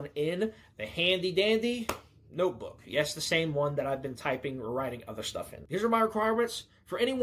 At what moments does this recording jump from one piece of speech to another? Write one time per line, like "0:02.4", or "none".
none